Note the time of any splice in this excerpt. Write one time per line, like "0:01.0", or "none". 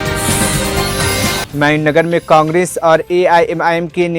0:01.4